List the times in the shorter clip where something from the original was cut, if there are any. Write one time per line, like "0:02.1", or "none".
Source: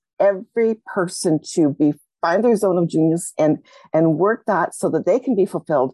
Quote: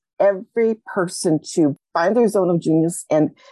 0:01.7